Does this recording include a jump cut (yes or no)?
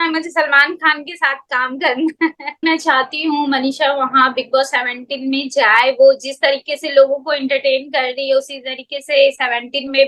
yes